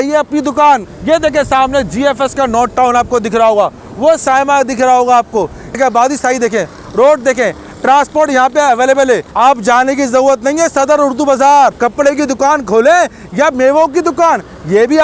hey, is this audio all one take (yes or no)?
no